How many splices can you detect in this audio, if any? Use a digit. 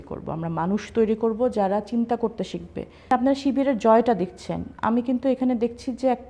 1